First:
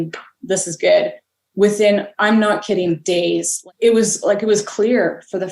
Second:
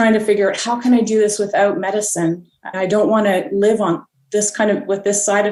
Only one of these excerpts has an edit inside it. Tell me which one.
first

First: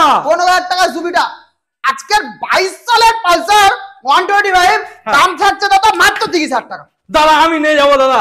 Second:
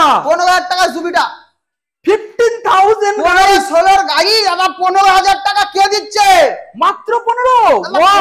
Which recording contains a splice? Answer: first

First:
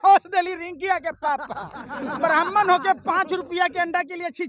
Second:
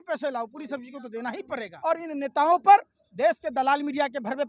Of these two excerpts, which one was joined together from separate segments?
second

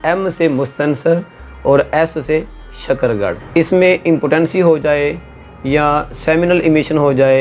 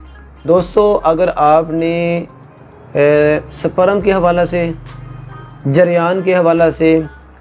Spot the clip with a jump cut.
first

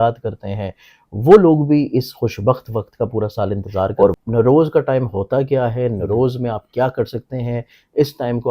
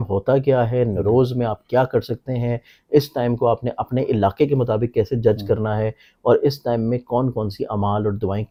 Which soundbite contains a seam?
first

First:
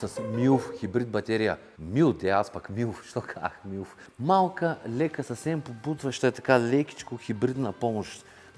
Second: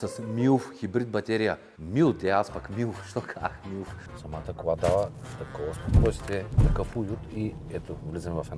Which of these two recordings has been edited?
second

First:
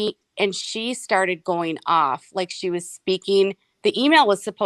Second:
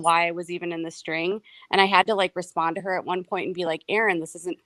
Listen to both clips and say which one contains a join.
first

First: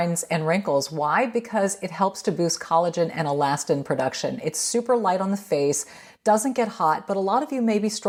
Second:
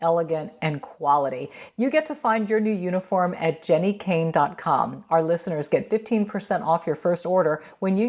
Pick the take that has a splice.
second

